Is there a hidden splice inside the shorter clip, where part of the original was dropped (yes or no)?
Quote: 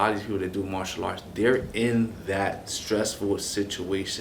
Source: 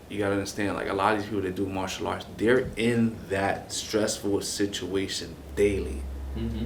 no